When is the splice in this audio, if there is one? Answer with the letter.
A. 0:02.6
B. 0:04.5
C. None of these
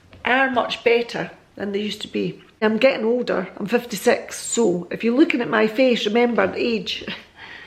A